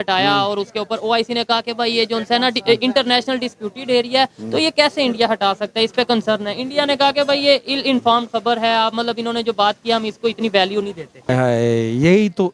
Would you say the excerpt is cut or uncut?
cut